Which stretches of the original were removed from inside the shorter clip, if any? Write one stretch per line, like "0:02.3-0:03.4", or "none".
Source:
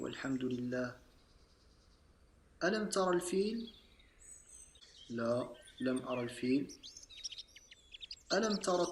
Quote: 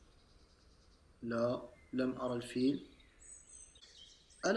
none